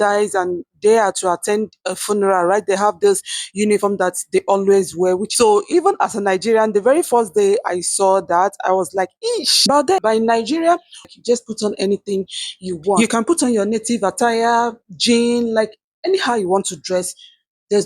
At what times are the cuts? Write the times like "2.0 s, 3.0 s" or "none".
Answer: 5.3 s, 10.0 s, 11.0 s